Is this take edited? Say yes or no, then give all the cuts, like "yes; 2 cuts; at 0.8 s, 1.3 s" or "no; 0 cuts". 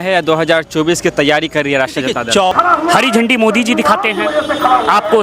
yes; 1 cut; at 2.5 s